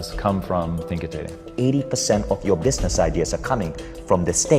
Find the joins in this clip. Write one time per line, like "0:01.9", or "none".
0:01.5